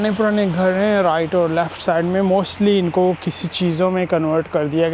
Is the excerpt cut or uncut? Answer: uncut